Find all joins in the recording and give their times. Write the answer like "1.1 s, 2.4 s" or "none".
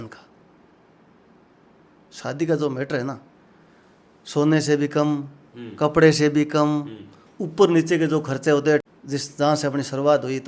8.8 s